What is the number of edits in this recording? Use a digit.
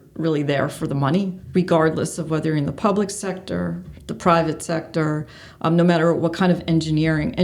1